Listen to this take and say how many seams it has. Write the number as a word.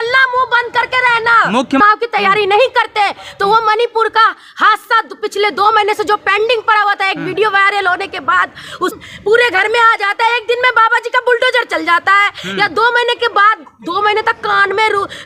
two